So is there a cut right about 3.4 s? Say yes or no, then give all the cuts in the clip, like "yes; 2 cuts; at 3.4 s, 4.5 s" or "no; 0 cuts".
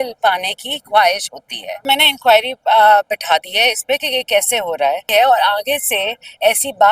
no; 2 cuts; at 1.8 s, 5.0 s